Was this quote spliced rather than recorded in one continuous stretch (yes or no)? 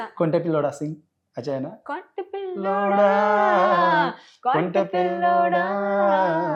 no